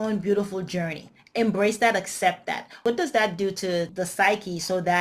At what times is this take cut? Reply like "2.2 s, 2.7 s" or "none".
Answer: 2.8 s, 3.9 s

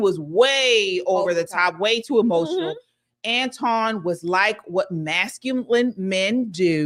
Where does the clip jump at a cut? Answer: none

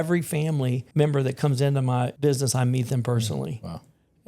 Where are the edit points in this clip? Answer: 0.8 s, 2.1 s

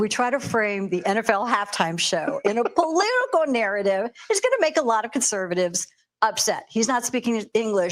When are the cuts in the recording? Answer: none

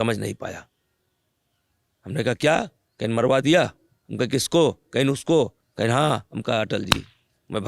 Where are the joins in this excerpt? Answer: 5.6 s

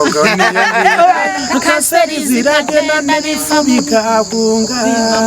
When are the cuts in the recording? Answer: 1.4 s

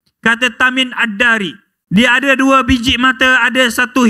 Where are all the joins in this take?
1.7 s

